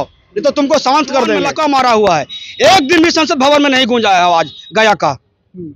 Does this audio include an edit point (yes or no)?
yes